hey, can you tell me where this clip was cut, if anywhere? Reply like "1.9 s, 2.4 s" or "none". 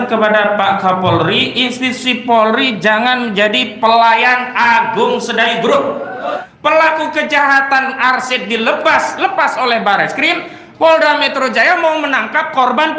6.4 s